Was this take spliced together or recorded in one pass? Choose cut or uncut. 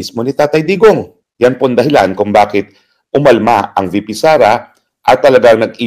cut